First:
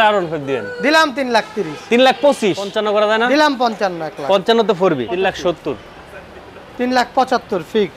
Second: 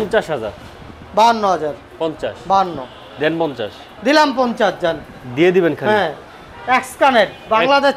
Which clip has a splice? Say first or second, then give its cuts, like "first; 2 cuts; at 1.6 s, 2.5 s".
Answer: first; 2 cuts; at 2.7 s, 5.1 s